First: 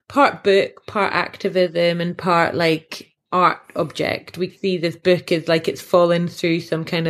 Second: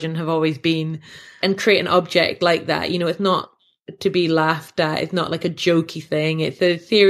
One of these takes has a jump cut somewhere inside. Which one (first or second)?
first